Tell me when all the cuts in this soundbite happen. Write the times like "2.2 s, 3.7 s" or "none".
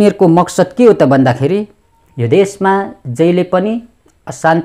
none